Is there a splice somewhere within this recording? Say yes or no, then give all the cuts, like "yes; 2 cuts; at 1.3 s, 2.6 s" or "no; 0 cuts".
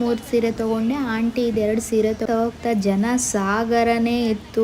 yes; 1 cut; at 2.2 s